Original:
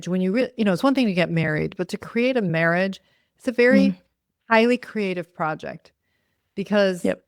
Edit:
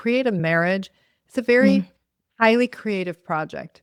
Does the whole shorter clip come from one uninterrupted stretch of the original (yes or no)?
yes